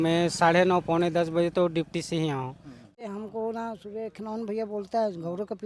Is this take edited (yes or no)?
yes